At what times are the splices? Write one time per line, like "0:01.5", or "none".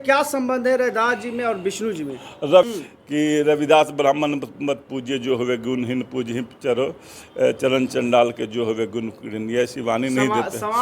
0:02.7